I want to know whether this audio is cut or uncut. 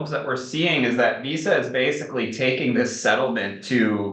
uncut